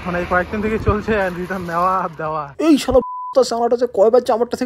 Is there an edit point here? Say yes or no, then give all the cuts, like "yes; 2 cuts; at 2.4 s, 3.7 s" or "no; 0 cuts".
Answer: no; 0 cuts